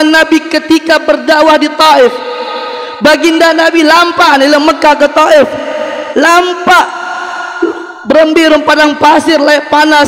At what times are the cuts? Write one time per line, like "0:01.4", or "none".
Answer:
none